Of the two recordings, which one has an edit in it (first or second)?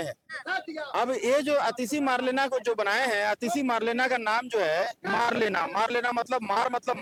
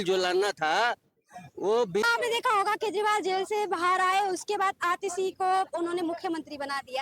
second